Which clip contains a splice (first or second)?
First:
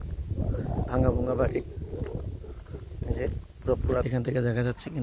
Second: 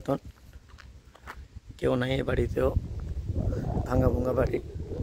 first